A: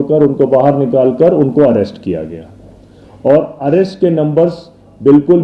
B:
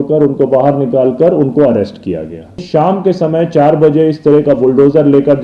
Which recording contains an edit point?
B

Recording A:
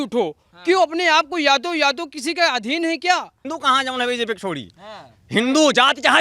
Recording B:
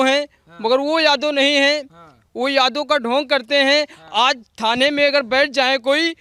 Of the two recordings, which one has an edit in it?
A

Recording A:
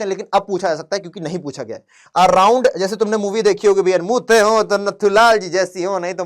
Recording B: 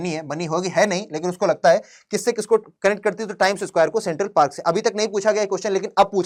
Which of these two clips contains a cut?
A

